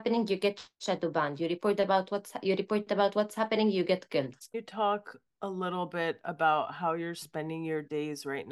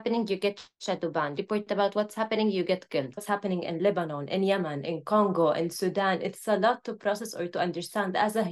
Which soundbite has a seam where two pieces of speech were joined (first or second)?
second